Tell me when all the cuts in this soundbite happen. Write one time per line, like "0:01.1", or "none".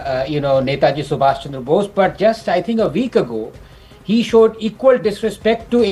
none